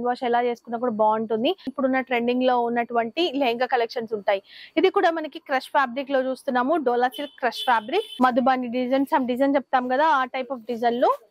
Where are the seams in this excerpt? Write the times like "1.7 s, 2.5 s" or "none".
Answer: 1.7 s, 8.1 s